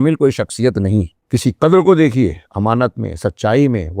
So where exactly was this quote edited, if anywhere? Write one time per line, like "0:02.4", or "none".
0:01.2